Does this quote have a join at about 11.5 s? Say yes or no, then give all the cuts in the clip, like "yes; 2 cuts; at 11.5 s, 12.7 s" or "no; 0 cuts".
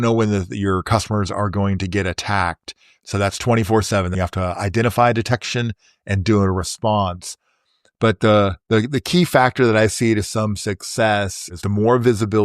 yes; 3 cuts; at 2.9 s, 4.1 s, 11.5 s